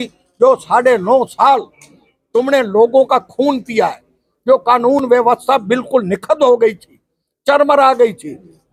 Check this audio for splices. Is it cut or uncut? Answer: uncut